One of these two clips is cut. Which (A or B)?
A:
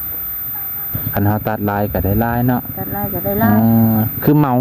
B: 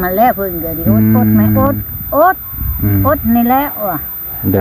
A